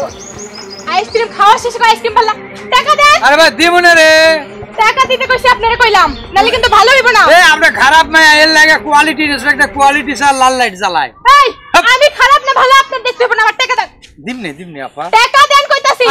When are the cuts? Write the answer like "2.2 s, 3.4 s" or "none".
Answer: none